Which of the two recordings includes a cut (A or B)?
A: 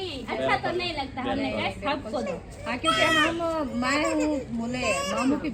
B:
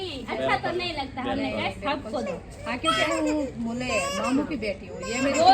B